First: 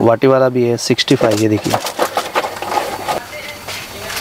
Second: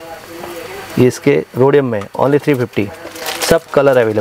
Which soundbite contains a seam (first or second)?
first